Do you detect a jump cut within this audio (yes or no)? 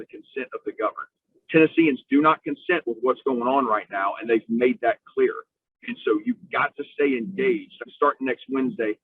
yes